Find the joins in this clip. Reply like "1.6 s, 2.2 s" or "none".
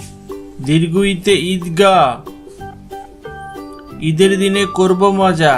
2.6 s, 4.0 s